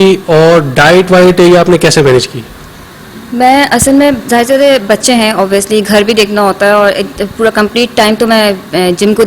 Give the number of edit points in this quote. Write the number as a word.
zero